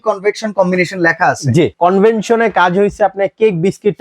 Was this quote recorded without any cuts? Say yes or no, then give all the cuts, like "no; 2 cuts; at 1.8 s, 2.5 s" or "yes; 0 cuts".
no; 1 cut; at 1.7 s